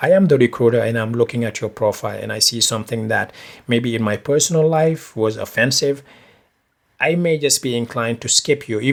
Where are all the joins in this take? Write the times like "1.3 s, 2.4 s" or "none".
none